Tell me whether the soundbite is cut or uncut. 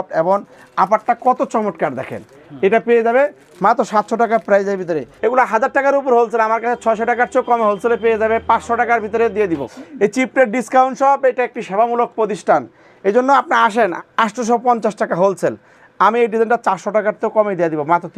cut